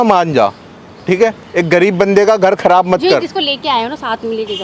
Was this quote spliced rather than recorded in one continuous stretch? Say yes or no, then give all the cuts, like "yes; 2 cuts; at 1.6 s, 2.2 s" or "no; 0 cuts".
no; 0 cuts